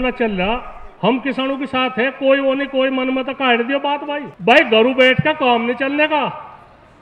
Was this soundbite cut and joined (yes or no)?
yes